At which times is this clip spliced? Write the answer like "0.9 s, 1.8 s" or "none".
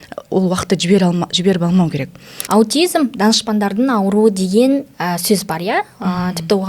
2.3 s